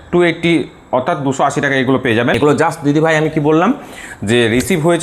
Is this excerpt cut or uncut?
cut